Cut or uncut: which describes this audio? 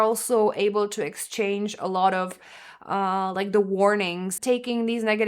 cut